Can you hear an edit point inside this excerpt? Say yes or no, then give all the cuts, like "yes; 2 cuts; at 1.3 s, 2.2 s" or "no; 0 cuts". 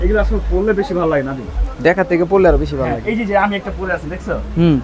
no; 0 cuts